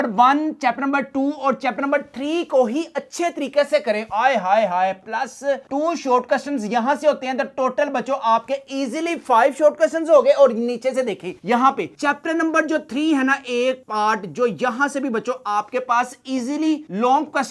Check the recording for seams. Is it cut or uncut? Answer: uncut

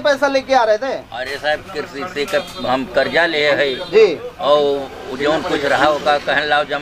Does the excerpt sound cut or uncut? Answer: uncut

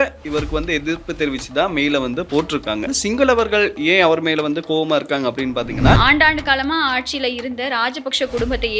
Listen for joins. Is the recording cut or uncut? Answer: cut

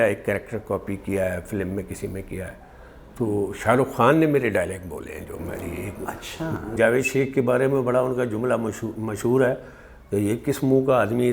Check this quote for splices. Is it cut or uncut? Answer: cut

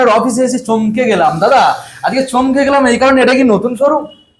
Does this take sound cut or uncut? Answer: uncut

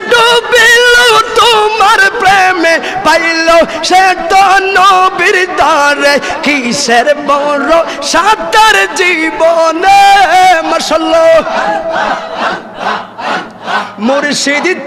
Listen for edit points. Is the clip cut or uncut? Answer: uncut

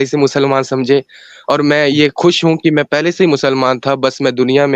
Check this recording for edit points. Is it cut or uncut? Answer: uncut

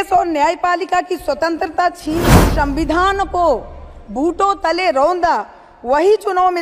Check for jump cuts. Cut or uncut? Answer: cut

